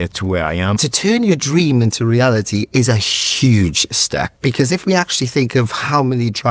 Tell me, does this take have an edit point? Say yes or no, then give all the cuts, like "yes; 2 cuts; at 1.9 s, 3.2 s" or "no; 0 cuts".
yes; 2 cuts; at 0.8 s, 4.5 s